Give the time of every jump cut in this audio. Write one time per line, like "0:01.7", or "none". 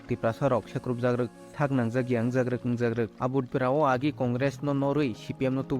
0:03.5